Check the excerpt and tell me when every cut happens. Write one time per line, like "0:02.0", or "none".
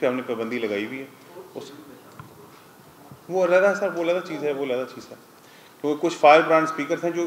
none